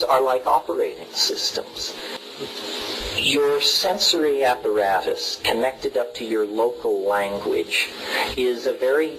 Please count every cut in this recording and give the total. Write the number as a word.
one